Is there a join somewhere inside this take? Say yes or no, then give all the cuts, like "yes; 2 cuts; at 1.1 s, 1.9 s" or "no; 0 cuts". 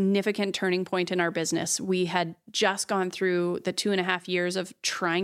no; 0 cuts